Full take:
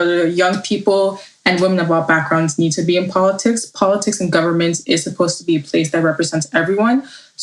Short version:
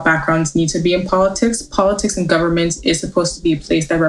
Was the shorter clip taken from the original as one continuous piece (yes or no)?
yes